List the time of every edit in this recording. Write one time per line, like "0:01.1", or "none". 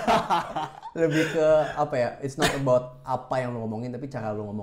none